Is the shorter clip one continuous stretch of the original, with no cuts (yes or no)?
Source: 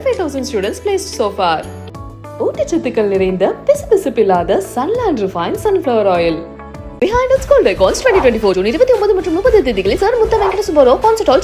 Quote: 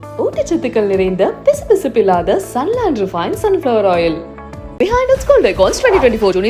yes